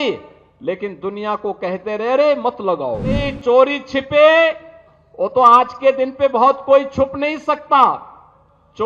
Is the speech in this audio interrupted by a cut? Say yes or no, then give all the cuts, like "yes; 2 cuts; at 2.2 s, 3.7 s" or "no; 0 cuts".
yes; 1 cut; at 3.3 s